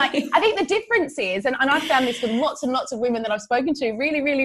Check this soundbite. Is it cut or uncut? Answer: uncut